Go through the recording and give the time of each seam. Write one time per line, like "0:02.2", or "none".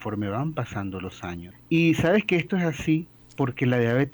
0:01.5
0:03.2